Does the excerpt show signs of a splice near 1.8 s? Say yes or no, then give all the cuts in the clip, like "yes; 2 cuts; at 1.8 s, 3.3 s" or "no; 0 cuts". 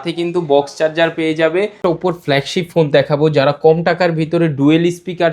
yes; 1 cut; at 1.8 s